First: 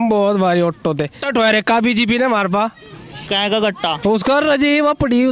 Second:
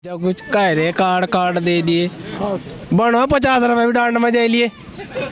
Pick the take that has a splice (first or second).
first